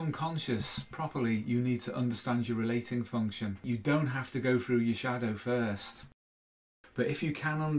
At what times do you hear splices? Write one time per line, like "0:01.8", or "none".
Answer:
0:03.6
0:06.2